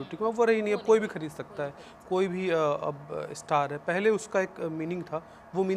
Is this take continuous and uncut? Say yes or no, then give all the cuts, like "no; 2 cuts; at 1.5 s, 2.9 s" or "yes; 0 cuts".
yes; 0 cuts